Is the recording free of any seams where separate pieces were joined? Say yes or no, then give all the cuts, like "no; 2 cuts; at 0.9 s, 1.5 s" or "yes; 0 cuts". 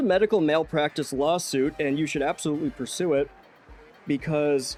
yes; 0 cuts